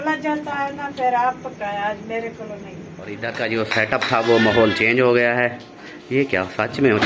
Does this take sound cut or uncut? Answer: cut